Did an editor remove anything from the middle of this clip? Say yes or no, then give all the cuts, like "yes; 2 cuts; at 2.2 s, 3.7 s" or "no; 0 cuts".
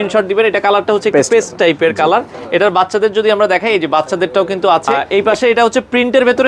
yes; 1 cut; at 5.0 s